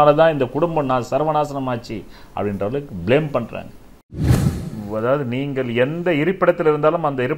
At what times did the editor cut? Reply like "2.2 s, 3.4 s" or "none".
4.2 s